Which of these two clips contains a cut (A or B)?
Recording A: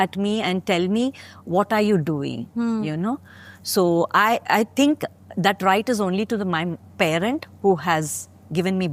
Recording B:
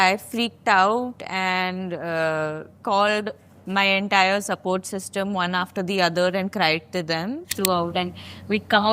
B